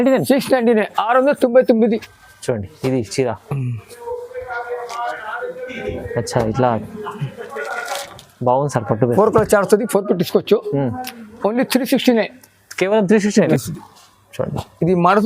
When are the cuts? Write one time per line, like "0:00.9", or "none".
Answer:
0:02.1
0:13.5